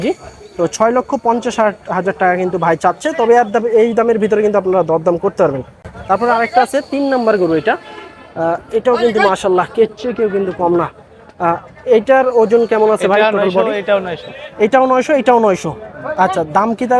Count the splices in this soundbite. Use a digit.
0